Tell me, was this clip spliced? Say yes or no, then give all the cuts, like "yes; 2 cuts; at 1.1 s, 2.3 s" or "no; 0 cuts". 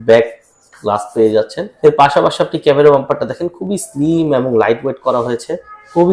yes; 1 cut; at 1.6 s